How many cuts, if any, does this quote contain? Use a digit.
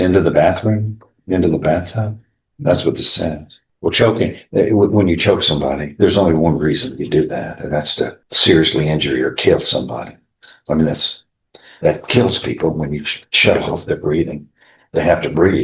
1